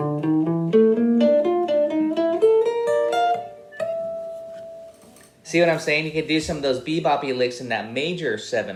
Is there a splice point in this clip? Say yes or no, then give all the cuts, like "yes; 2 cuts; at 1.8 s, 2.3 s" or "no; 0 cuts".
no; 0 cuts